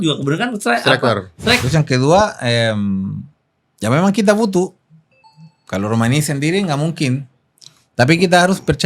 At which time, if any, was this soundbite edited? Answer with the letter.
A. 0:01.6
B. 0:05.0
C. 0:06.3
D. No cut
A